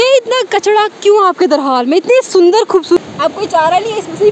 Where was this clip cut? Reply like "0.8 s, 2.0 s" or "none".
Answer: 3.0 s